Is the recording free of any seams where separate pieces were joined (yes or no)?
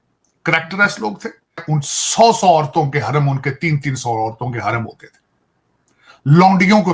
no